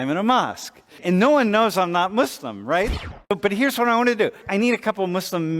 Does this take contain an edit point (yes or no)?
yes